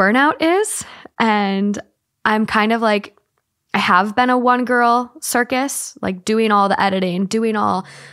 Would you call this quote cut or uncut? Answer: uncut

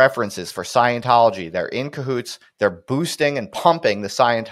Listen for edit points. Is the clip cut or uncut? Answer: uncut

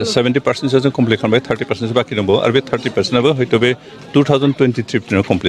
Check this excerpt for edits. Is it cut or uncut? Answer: uncut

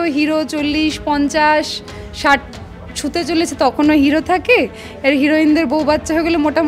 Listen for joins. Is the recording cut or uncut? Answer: uncut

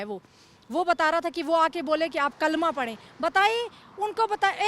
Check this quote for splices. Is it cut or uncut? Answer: uncut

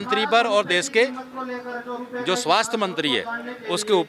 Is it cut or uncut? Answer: uncut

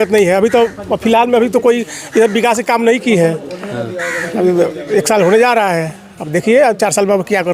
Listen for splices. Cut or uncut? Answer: uncut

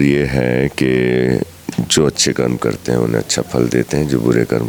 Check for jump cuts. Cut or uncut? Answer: uncut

